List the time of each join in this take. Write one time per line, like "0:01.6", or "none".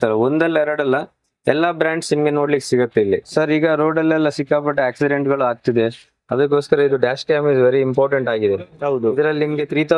0:03.3